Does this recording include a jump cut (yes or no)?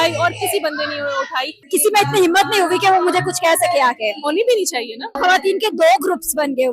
yes